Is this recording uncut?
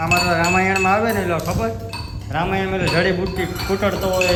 yes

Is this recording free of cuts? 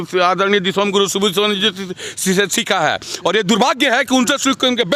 yes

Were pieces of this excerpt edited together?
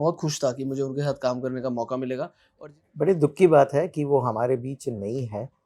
yes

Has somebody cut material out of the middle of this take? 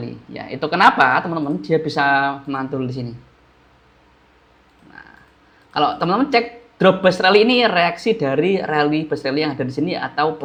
no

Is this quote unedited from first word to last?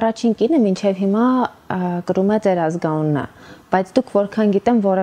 yes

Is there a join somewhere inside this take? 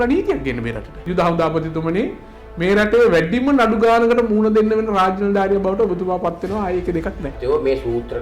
yes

